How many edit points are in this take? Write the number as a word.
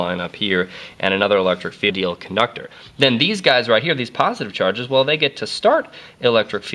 zero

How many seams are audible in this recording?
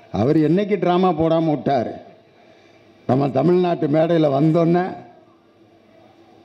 zero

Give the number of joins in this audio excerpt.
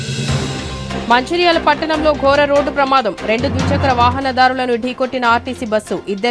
one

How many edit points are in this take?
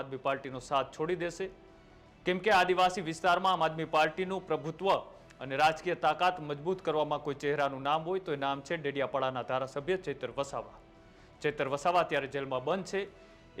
zero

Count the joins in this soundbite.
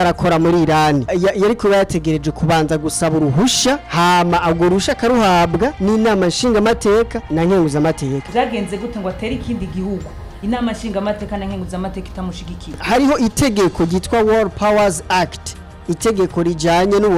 six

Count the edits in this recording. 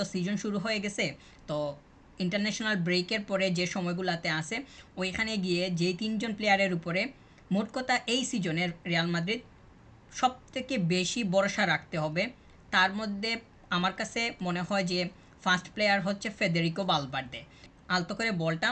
one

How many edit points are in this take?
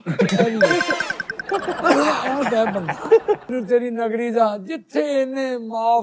one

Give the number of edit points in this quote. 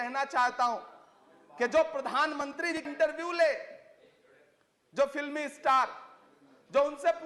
one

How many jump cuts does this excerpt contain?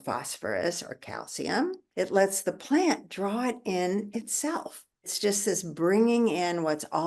two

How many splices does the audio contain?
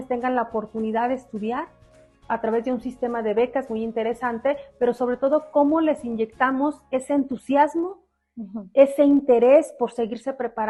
zero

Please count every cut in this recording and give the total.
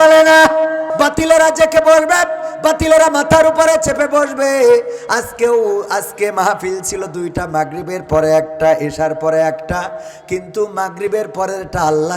one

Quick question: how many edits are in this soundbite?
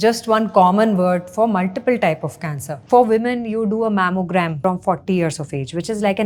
one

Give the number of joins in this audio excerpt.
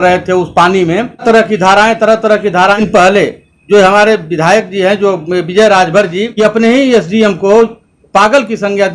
three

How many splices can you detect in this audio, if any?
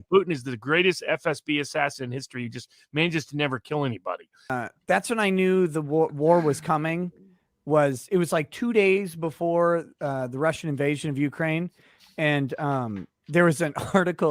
one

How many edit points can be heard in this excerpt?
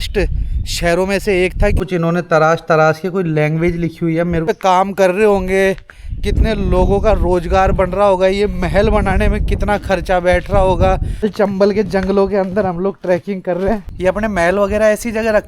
four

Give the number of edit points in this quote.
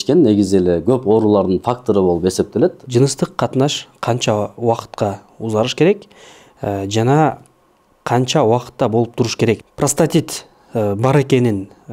two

